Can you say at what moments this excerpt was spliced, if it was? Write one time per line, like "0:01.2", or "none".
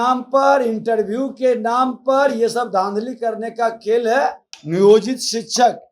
0:04.5